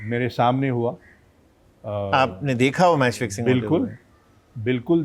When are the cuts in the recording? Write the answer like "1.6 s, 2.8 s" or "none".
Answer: none